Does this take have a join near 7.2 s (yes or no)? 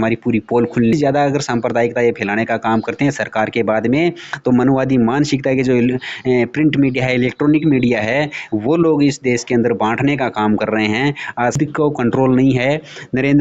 no